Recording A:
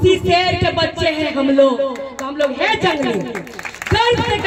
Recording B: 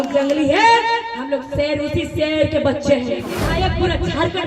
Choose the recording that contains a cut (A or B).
B